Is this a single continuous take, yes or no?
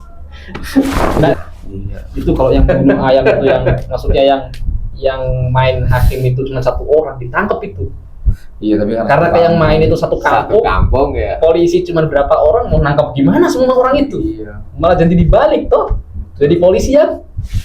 no